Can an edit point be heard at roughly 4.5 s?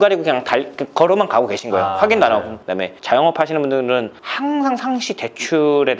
no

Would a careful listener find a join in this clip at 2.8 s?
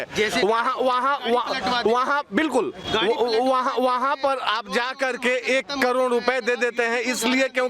no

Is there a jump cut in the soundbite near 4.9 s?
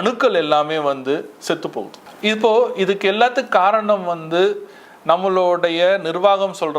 no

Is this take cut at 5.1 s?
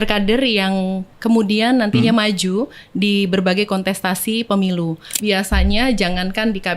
yes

